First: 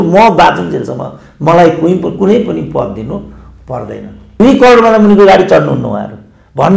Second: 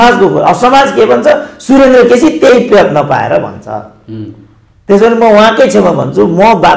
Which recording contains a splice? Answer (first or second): first